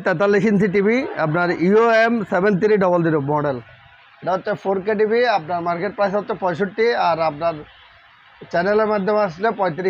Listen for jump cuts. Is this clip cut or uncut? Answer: uncut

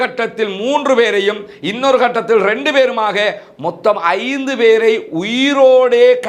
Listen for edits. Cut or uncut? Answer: uncut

